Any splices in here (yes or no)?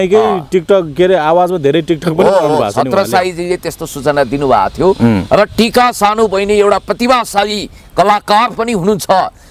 no